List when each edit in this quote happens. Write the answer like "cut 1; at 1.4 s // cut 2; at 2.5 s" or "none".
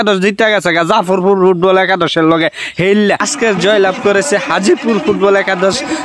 cut 1; at 3.3 s